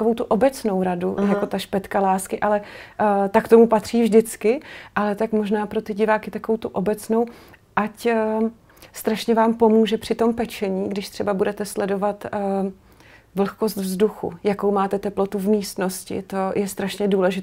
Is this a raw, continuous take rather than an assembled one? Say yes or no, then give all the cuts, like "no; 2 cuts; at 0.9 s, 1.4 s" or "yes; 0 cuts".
yes; 0 cuts